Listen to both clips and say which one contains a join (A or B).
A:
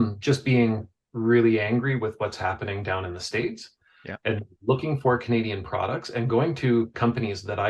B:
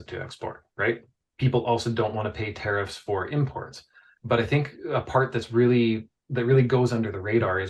B